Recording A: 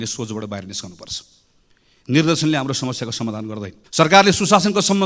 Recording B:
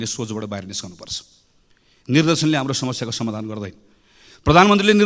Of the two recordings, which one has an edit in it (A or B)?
A